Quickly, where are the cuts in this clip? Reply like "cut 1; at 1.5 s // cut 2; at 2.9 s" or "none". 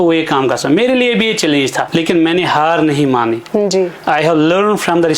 cut 1; at 1.9 s

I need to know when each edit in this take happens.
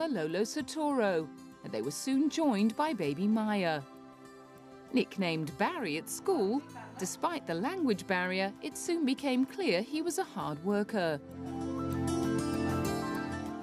none

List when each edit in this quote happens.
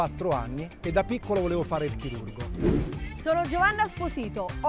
cut 1; at 2.7 s

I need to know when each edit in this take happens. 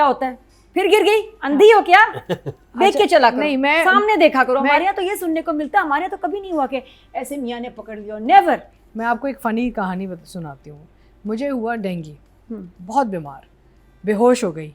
none

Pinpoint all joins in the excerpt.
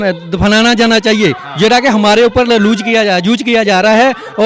none

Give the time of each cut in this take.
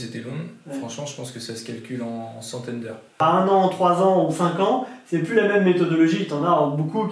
cut 1; at 3.0 s

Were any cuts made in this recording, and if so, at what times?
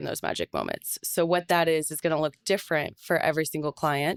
none

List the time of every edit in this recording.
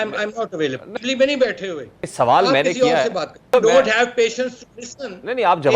cut 1; at 0.9 s // cut 2; at 1.9 s // cut 3; at 3.5 s

